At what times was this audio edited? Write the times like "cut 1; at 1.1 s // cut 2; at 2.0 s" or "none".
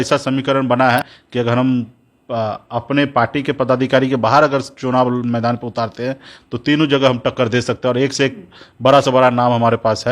cut 1; at 1.0 s